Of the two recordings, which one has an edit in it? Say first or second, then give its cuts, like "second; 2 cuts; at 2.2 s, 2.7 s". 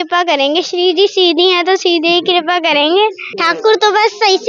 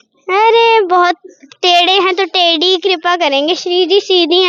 first; 1 cut; at 3.3 s